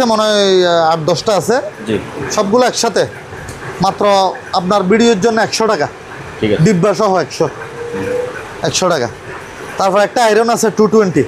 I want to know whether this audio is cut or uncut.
uncut